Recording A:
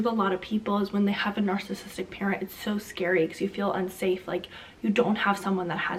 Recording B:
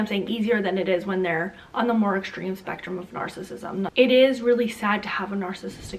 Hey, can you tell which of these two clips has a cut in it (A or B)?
B